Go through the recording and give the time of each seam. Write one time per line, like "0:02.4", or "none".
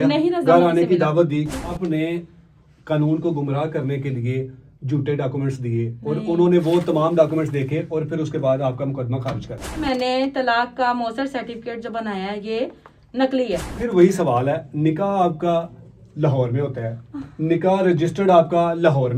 0:01.6
0:09.8
0:13.8